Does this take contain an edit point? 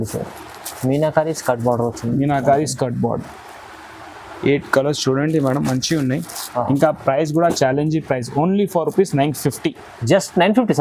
no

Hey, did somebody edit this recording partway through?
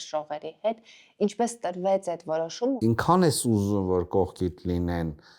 yes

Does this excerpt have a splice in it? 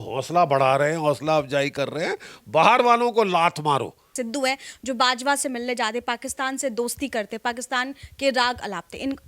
yes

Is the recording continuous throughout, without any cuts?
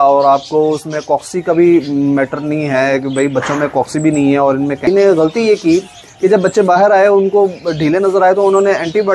no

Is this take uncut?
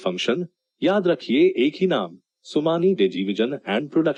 yes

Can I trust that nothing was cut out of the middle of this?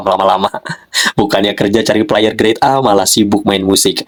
yes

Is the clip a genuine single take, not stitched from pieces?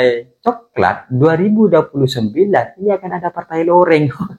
yes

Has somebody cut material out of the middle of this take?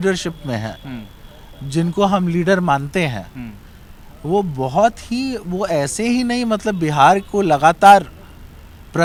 no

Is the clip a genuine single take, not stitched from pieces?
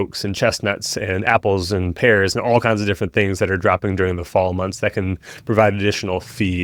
yes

